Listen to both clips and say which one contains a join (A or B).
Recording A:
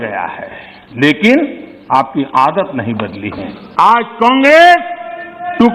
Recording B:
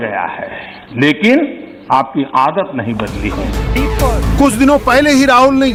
A